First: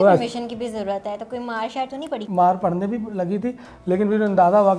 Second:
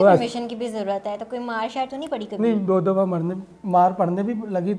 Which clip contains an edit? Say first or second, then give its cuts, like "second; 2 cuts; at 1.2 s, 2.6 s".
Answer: first; 1 cut; at 2.2 s